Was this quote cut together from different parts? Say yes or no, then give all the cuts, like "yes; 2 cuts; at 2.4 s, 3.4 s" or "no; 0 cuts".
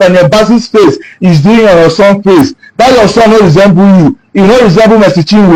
no; 0 cuts